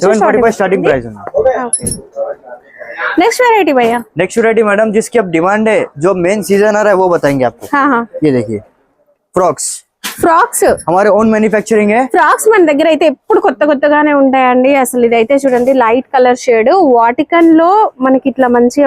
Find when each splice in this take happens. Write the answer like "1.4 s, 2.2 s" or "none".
1.2 s